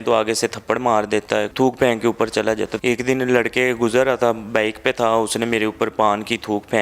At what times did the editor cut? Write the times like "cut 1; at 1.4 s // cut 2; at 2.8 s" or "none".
cut 1; at 1.5 s // cut 2; at 2.7 s